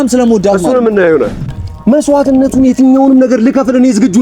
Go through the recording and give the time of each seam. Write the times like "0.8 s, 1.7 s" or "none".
1.4 s